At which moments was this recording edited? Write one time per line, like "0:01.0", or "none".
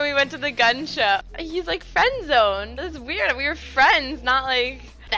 0:01.2

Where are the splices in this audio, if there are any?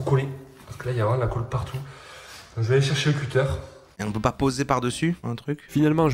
0:04.0

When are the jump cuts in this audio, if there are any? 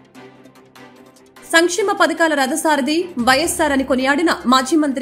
0:01.0

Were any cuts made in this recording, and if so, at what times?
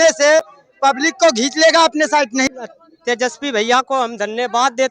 0:02.5

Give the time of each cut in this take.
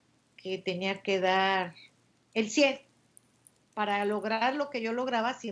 none

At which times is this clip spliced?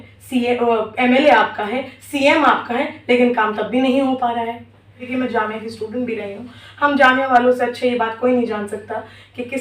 0:05.0

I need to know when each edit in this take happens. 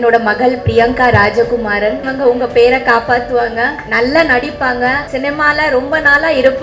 0:02.1
0:03.8
0:05.0

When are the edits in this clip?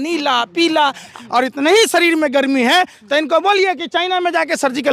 0:01.2

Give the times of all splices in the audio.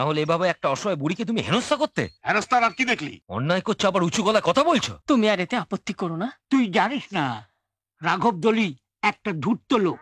0:02.2
0:03.2
0:04.9

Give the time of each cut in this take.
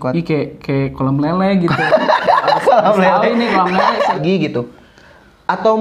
0:04.2

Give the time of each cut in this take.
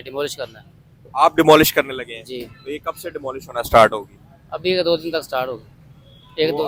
none

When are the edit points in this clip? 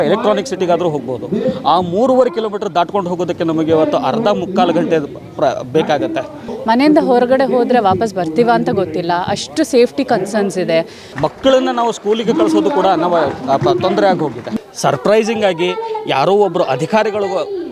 0:06.5
0:11.0
0:14.5

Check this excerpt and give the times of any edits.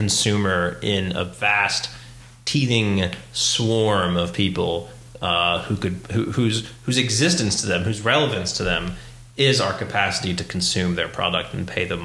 none

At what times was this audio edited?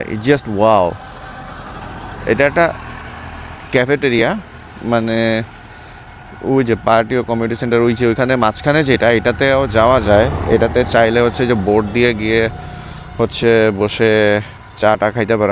none

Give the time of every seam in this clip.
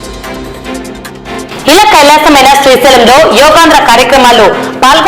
0:01.3

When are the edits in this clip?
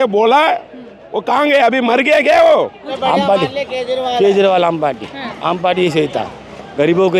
0:02.9

